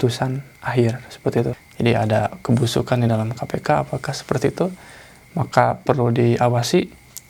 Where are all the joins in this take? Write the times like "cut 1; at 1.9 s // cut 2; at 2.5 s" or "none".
cut 1; at 1.6 s